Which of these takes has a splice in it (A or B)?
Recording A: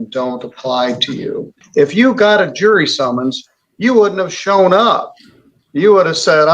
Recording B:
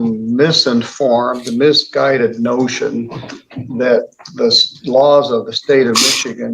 A